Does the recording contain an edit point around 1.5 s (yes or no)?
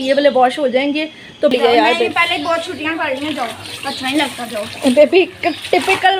yes